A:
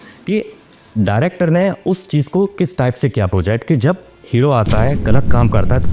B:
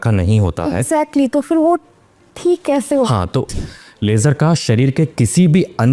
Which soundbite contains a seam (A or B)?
B